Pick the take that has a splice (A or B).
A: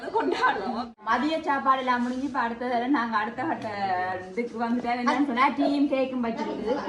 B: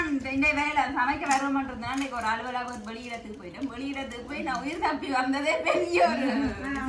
A